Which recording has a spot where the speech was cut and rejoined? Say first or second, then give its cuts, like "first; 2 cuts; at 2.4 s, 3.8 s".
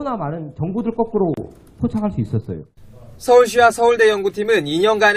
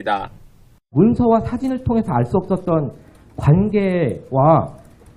second; 1 cut; at 3.6 s